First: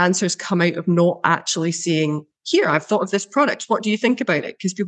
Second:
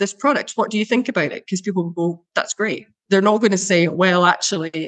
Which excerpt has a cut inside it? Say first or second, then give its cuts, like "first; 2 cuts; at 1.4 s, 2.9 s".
second; 1 cut; at 2.7 s